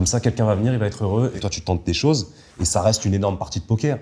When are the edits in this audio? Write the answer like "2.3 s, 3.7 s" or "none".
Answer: 1.4 s